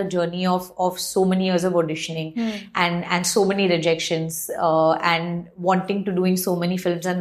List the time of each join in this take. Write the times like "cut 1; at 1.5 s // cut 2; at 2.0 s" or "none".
none